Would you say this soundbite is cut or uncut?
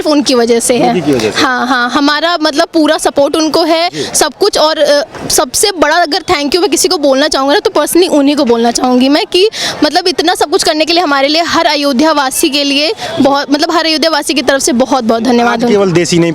uncut